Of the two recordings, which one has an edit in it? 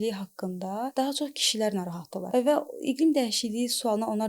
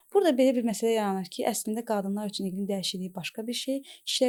first; 2 cuts; at 0.9 s, 2.2 s

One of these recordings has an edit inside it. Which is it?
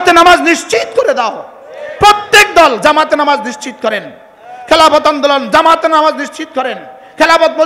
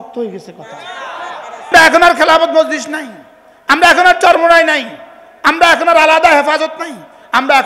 second; 1 cut; at 1.7 s

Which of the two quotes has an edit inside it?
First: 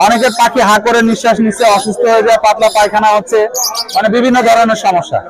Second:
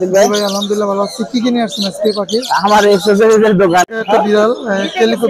second; 1 cut; at 3.9 s

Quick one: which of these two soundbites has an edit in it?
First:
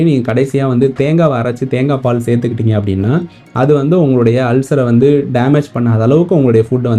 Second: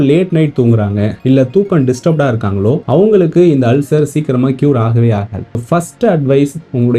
second; 2 cuts; at 1.1 s, 2.8 s

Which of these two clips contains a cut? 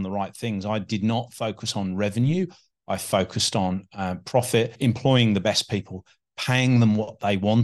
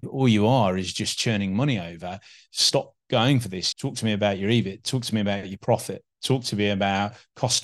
first; 1 cut; at 4.7 s

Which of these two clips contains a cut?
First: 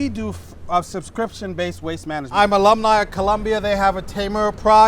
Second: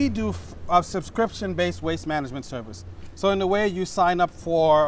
first; 1 cut; at 2.2 s

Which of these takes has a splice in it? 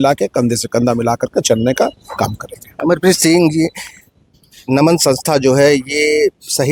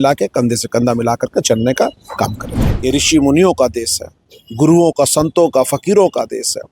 second; 1 cut; at 2.6 s

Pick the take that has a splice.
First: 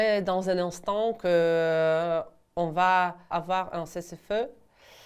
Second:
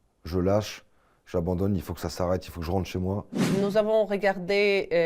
second; 1 cut; at 3.3 s

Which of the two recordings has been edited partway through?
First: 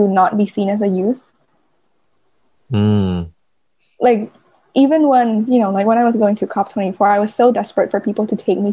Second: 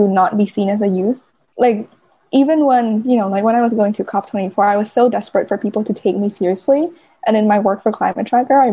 second; 1 cut; at 1.4 s

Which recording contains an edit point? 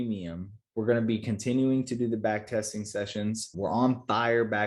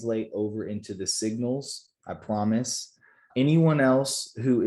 second; 1 cut; at 3.2 s

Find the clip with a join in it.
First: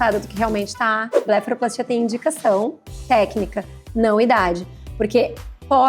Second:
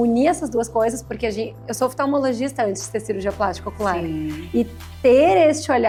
first; 1 cut; at 1.2 s

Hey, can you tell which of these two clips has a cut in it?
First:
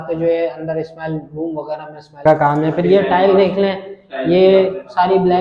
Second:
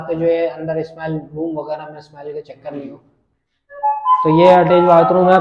first; 1 cut; at 2.2 s

